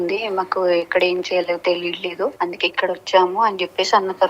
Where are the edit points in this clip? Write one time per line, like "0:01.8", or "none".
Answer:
0:02.3